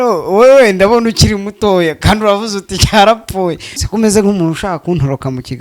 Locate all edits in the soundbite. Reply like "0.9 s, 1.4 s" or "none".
3.8 s